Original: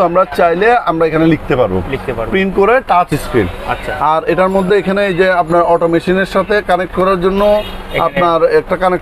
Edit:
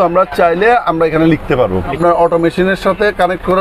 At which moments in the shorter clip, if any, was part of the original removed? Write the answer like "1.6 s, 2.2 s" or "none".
1.9 s